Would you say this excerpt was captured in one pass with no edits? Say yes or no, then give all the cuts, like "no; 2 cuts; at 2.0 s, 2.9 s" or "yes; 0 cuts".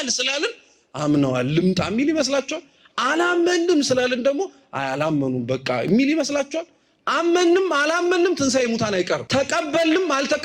no; 1 cut; at 9.2 s